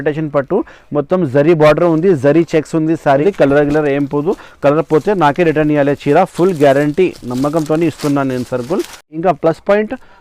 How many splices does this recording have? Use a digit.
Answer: 2